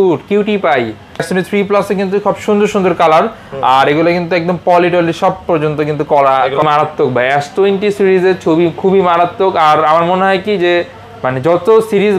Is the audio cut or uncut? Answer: cut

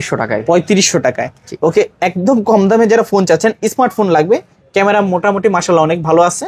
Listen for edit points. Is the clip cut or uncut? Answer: uncut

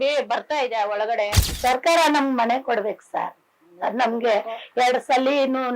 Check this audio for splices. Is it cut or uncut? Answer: cut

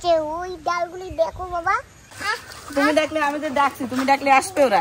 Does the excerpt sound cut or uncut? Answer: cut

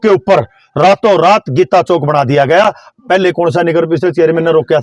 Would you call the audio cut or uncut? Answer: uncut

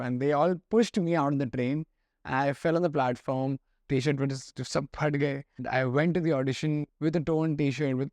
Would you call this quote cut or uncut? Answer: cut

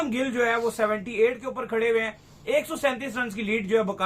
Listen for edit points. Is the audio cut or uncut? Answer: uncut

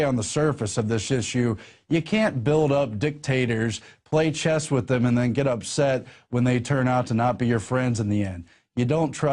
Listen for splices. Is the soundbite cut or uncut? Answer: cut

